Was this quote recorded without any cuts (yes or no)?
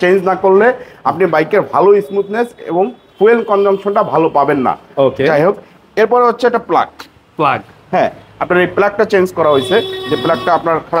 yes